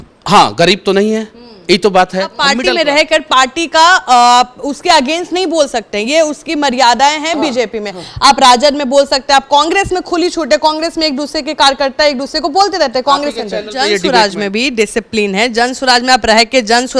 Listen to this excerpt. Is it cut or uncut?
cut